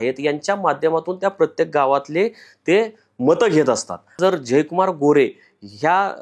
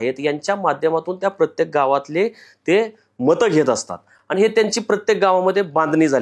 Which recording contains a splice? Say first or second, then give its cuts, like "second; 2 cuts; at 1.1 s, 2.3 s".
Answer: first; 1 cut; at 4.2 s